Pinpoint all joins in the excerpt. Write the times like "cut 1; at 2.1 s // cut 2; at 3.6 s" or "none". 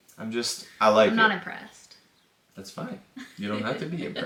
none